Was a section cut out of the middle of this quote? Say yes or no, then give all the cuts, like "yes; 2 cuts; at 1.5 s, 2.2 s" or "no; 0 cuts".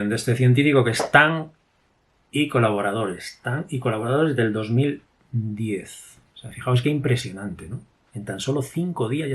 yes; 1 cut; at 6.3 s